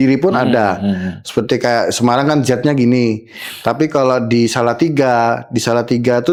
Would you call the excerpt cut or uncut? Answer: uncut